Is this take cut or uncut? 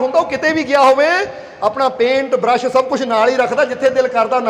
uncut